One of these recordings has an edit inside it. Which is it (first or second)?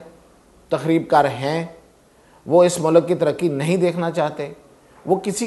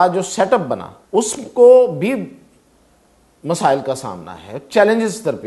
second